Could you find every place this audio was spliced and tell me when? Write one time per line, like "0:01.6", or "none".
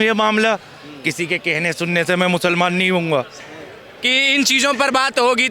0:03.4